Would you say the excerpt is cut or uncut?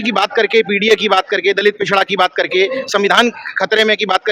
uncut